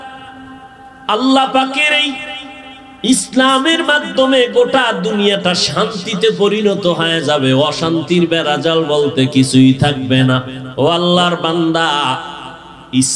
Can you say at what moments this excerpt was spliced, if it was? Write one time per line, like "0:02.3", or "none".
0:10.6